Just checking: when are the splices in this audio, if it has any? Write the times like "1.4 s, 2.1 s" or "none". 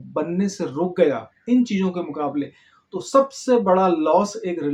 none